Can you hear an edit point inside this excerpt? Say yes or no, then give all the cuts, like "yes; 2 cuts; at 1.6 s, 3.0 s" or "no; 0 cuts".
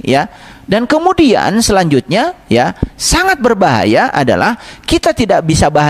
no; 0 cuts